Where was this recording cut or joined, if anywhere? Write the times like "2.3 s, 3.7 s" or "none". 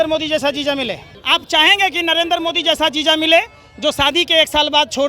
1.1 s